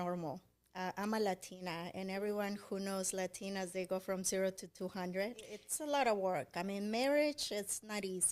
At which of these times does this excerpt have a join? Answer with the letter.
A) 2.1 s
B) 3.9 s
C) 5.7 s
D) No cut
C